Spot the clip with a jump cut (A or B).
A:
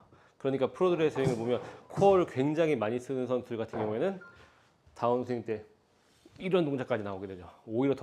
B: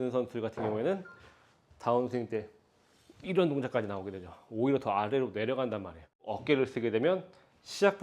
B